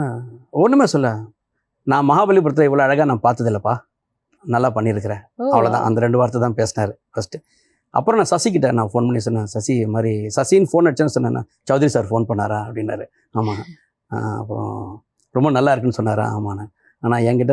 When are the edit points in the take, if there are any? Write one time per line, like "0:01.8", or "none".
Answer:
none